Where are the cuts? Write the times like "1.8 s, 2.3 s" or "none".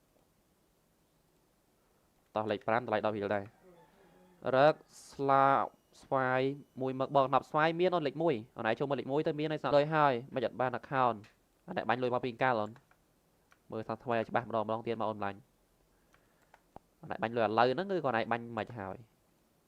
none